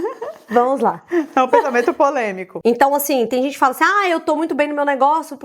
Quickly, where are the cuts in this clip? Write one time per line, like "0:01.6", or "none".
0:02.4